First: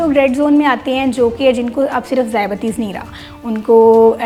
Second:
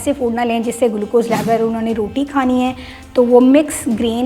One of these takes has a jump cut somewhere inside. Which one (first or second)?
second